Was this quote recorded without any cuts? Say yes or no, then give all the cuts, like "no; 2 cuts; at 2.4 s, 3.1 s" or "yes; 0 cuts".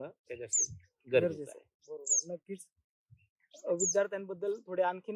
yes; 0 cuts